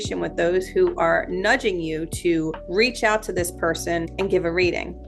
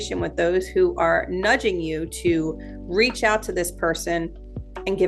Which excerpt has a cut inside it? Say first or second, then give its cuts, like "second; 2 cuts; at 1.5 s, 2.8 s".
first; 2 cuts; at 2.6 s, 4.1 s